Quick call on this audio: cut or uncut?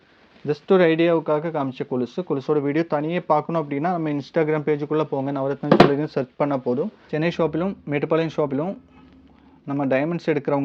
cut